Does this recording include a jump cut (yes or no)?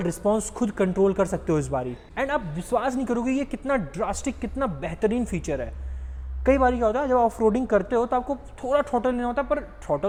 no